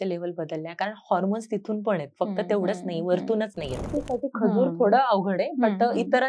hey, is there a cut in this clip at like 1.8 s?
no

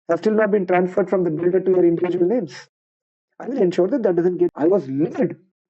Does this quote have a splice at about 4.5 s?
yes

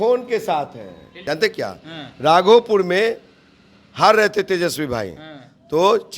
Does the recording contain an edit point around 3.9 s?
no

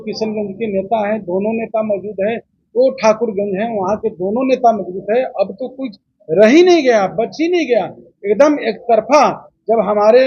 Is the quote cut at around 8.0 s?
no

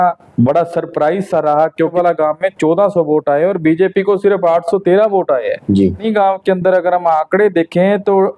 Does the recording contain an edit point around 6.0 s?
yes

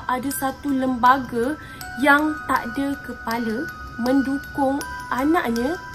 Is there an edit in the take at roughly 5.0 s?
no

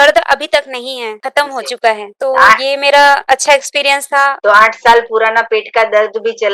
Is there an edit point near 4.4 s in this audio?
yes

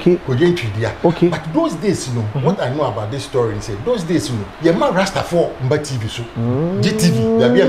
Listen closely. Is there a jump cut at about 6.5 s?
no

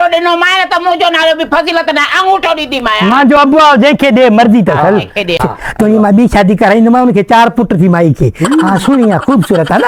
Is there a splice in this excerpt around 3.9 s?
no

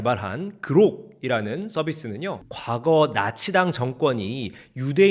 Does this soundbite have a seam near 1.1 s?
no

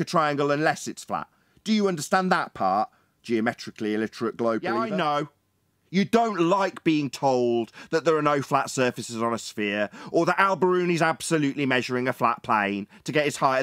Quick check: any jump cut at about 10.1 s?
no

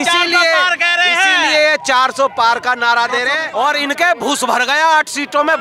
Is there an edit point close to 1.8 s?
no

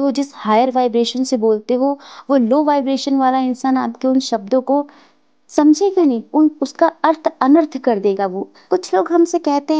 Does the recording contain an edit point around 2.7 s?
no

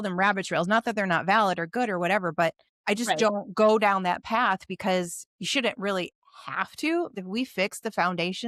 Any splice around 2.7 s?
yes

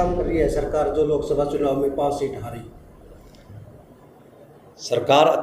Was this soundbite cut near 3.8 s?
no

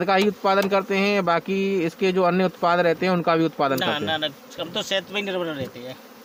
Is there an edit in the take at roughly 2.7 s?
no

